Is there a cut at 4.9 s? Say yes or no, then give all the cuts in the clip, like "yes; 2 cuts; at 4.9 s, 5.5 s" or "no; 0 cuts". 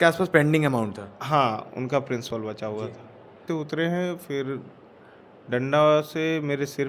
no; 1 cut; at 3.4 s